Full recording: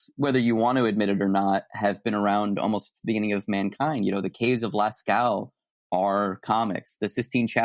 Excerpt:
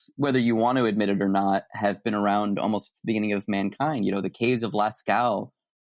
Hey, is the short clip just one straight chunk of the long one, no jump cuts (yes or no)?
yes